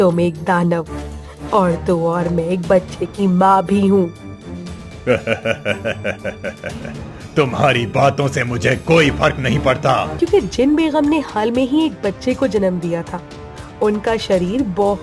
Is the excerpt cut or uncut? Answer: cut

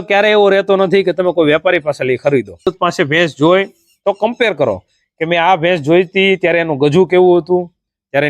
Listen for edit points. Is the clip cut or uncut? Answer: cut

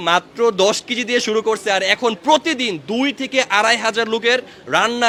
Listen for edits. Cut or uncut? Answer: uncut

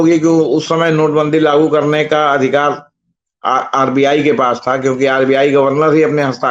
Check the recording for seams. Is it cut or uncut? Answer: uncut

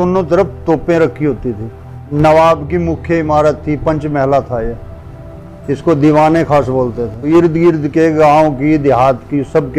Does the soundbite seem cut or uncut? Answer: cut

